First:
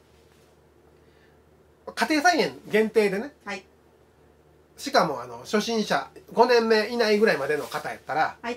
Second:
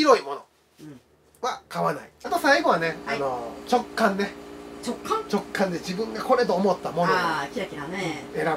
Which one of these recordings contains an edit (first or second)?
second